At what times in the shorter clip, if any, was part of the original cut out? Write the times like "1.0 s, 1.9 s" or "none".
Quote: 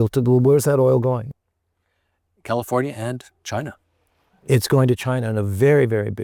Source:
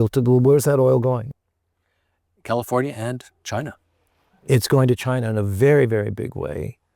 none